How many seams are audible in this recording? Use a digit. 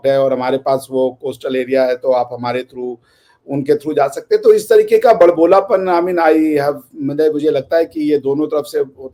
0